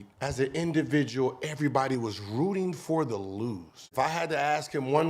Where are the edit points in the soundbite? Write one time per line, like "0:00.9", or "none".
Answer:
0:03.8